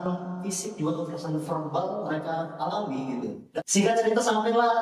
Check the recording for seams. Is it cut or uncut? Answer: cut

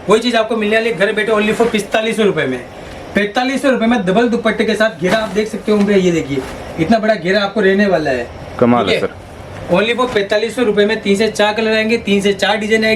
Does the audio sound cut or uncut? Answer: uncut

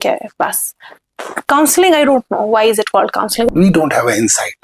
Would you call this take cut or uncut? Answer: cut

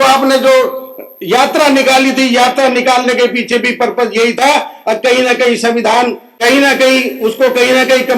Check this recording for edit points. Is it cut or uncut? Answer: uncut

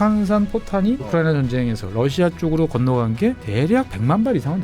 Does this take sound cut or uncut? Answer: cut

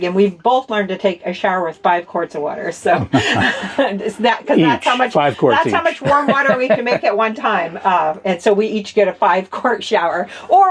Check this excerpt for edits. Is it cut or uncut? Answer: uncut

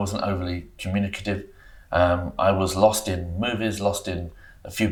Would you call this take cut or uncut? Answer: uncut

